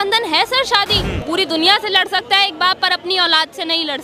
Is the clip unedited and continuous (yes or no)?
no